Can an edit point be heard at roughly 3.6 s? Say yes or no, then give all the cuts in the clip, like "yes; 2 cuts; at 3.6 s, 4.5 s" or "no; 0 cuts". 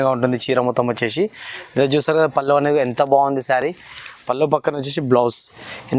no; 0 cuts